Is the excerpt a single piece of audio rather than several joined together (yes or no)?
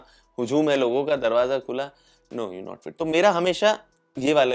yes